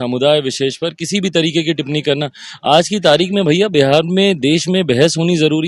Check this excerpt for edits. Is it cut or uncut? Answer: uncut